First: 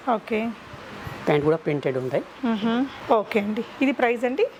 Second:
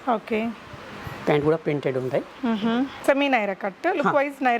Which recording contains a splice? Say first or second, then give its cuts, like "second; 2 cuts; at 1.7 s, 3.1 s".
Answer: second; 1 cut; at 3.0 s